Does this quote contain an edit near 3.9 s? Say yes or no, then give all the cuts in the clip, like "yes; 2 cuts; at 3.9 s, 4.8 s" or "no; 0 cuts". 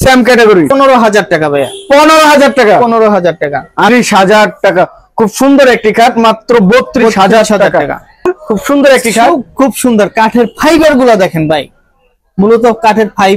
yes; 3 cuts; at 0.7 s, 3.9 s, 8.2 s